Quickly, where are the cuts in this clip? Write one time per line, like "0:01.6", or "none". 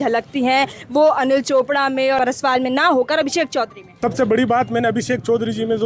0:02.2
0:03.8